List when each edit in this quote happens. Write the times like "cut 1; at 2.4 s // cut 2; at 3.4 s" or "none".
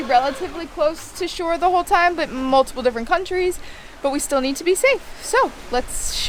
none